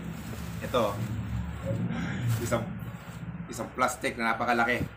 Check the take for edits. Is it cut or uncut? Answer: uncut